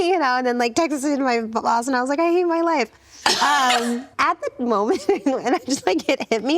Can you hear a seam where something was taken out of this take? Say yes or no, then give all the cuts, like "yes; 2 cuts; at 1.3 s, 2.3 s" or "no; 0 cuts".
yes; 1 cut; at 4.1 s